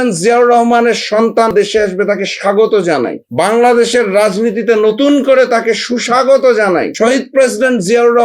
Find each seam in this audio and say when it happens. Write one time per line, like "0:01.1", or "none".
0:01.5
0:03.2
0:06.9